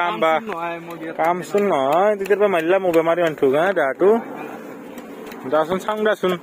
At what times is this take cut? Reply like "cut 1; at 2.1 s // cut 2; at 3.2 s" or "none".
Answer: none